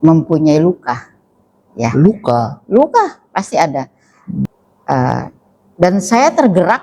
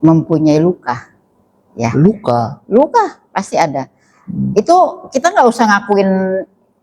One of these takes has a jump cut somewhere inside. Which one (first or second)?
first